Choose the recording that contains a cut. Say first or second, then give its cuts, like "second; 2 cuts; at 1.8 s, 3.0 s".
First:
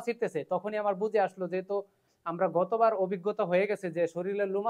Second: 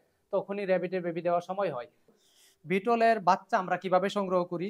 second; 1 cut; at 2.1 s